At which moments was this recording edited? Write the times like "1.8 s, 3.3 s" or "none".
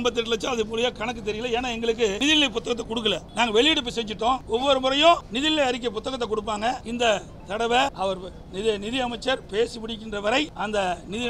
2.2 s, 3.3 s, 4.4 s, 5.3 s, 6.9 s, 7.9 s, 10.5 s